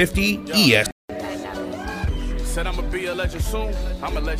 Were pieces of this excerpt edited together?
yes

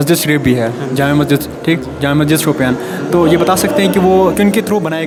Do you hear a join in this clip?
no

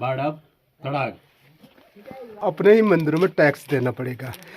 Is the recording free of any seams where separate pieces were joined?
no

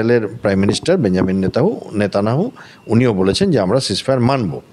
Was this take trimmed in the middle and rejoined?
no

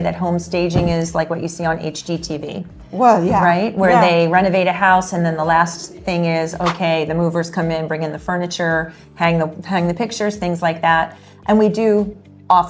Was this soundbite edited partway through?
no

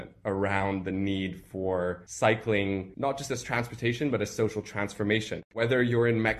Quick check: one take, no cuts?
no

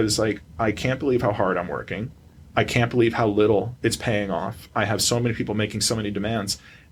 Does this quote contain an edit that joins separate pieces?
no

